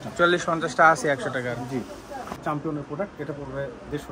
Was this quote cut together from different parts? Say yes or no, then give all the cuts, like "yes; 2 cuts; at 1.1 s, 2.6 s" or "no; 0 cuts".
yes; 1 cut; at 2.4 s